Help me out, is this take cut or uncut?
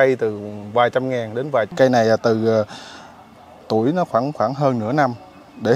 cut